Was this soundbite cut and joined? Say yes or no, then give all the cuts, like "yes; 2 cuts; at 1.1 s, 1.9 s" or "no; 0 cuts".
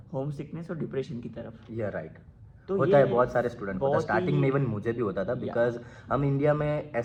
no; 0 cuts